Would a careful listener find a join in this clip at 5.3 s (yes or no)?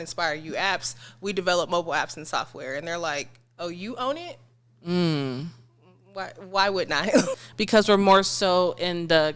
no